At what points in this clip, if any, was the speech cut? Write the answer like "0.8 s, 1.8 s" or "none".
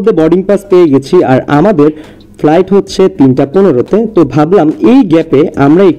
none